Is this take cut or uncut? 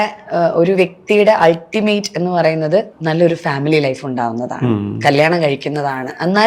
uncut